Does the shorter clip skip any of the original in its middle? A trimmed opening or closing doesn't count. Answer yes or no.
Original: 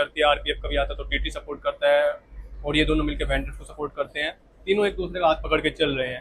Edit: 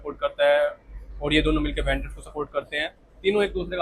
no